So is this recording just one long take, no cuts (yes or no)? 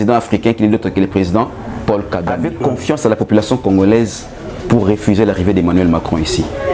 no